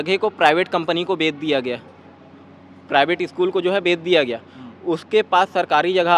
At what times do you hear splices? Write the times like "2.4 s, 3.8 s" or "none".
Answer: none

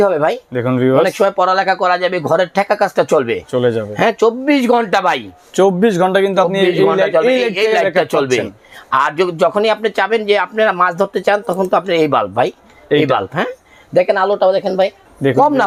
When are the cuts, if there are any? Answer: none

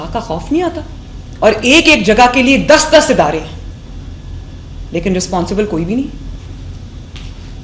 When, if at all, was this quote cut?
none

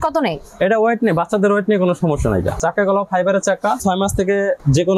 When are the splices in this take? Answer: 2.5 s, 3.8 s

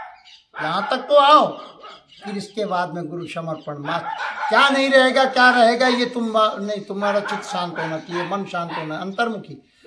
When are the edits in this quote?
4.2 s

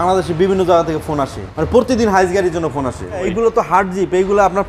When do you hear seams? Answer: 1.5 s, 3.3 s

